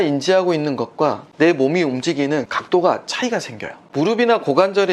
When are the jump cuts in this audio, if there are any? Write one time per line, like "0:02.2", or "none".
0:01.2
0:02.5
0:03.8